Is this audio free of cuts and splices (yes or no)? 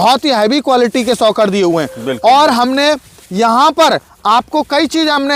yes